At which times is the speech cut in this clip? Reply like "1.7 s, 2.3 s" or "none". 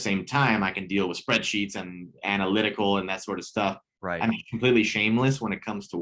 none